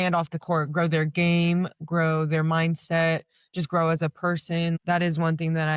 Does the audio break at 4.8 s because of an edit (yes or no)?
yes